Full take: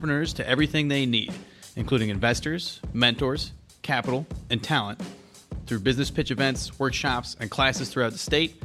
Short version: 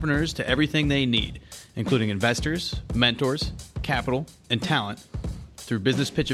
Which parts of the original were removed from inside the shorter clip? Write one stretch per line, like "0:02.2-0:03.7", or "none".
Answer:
none